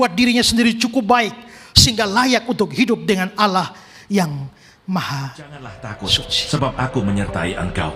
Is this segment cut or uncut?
cut